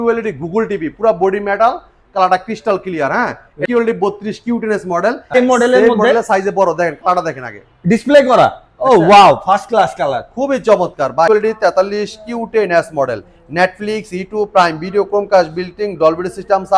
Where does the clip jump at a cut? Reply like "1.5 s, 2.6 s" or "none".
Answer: 3.6 s, 5.3 s, 11.3 s